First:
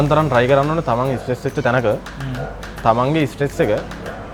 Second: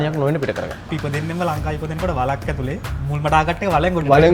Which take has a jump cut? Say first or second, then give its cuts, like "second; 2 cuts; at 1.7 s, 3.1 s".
second; 1 cut; at 0.9 s